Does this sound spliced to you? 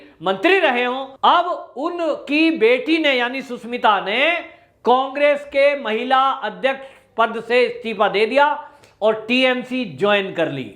yes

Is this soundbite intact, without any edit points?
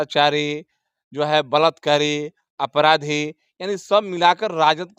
yes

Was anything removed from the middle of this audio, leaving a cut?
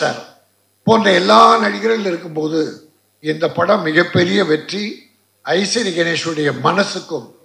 no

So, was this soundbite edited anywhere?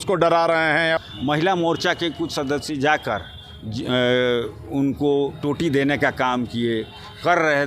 yes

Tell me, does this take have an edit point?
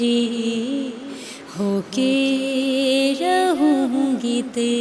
no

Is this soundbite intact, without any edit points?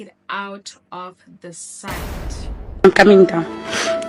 yes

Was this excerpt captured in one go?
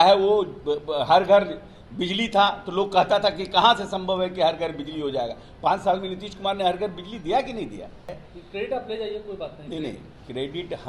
no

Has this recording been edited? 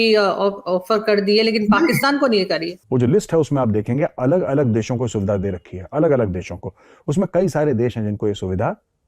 yes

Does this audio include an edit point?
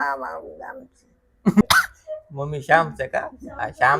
yes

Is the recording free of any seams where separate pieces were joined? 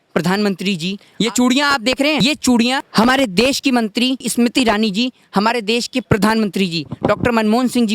no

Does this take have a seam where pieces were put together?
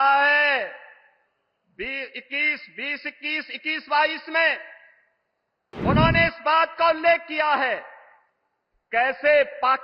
no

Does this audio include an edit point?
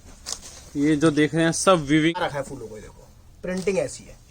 yes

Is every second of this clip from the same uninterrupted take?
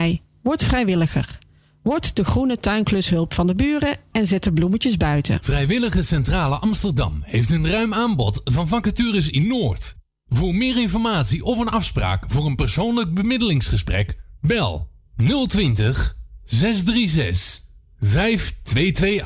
no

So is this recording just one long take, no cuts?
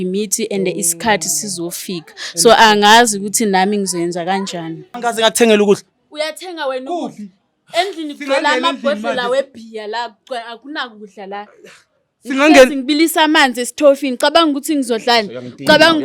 no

